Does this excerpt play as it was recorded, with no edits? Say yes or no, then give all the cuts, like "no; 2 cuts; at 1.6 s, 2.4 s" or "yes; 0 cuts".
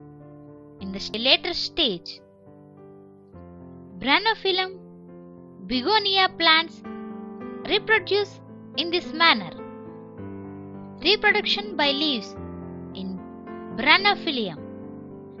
no; 1 cut; at 1.1 s